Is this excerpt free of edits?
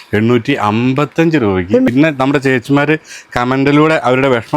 no; 1 cut; at 1.9 s

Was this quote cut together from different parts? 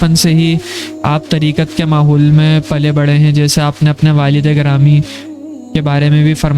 no; 0 cuts

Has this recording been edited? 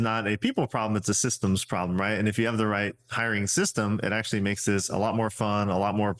no; 0 cuts

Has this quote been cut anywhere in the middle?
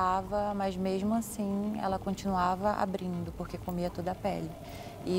no; 0 cuts

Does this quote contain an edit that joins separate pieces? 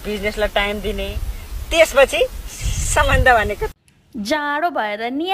yes; 1 cut; at 3.7 s

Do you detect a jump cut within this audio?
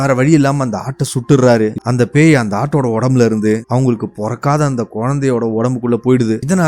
yes; 1 cut; at 1.8 s

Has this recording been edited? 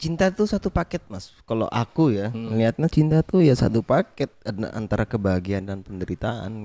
no; 0 cuts

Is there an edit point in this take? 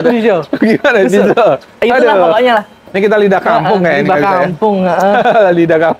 no; 0 cuts

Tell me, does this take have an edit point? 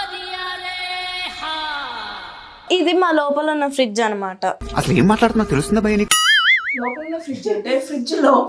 yes; 2 cuts; at 2.7 s, 4.6 s

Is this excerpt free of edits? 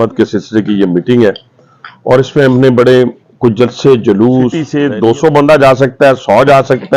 no; 1 cut; at 4.6 s

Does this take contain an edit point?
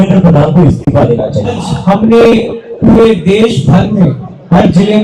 yes; 1 cut; at 1.7 s

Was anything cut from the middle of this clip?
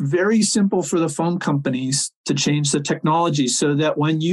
no; 0 cuts

